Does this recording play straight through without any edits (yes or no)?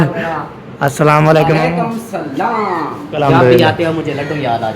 no